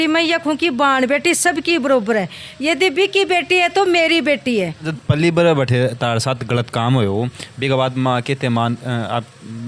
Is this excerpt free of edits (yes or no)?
no